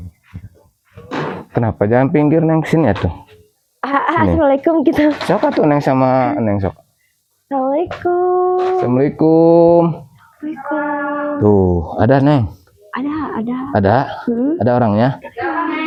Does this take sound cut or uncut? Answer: uncut